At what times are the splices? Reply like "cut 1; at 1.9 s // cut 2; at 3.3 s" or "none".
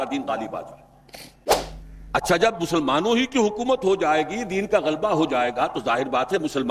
cut 1; at 1.3 s